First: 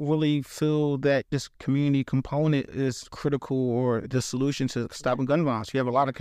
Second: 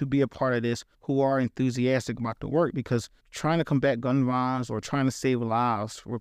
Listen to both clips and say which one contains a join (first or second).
first